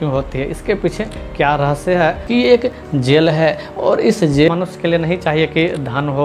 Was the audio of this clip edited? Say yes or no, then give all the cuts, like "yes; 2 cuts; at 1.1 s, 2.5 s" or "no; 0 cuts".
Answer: yes; 2 cuts; at 2.2 s, 4.5 s